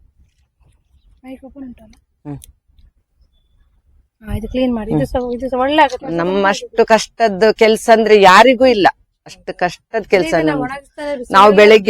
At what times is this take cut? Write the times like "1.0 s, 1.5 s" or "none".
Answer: 6.0 s